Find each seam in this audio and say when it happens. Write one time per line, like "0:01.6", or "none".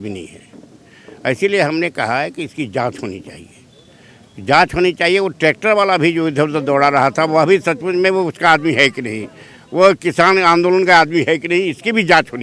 none